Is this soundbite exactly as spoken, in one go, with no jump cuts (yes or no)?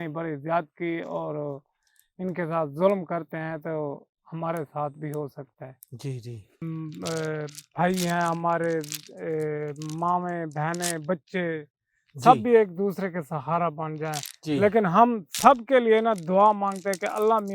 no